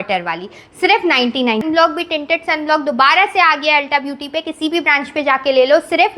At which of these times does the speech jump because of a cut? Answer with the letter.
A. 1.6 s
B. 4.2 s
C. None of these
A